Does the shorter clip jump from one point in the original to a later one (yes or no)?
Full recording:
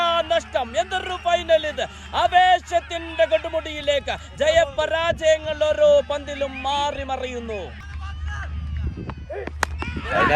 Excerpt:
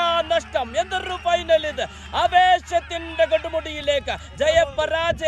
no